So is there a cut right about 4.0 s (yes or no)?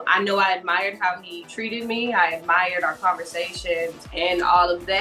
yes